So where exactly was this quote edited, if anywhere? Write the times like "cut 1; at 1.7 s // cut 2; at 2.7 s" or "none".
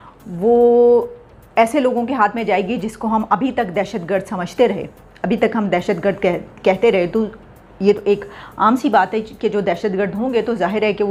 none